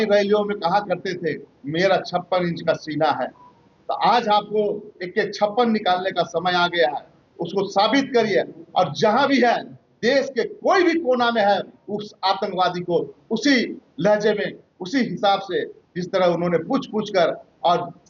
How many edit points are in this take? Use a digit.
0